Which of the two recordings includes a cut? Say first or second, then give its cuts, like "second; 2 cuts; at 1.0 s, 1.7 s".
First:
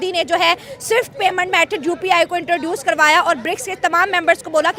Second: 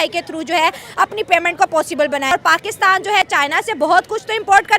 second; 1 cut; at 2.3 s